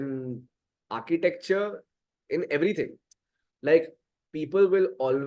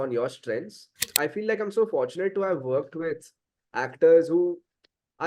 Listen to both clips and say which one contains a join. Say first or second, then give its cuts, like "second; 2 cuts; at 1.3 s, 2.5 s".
second; 1 cut; at 1.1 s